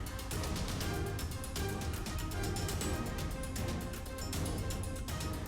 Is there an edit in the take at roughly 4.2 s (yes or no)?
no